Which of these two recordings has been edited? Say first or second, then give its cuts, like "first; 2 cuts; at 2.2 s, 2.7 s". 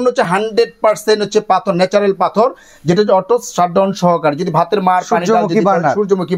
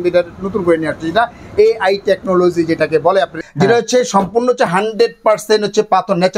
second; 1 cut; at 3.4 s